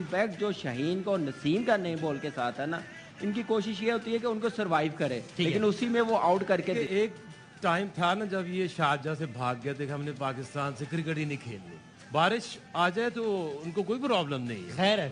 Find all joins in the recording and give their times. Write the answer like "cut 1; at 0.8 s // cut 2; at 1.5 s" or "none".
cut 1; at 6.8 s // cut 2; at 11.9 s